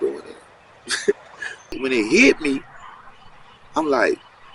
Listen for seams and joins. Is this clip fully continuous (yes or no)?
no